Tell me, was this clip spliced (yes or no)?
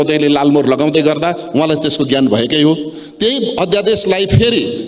no